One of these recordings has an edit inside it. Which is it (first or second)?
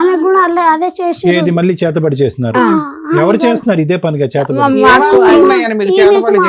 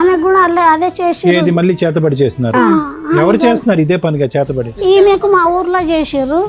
second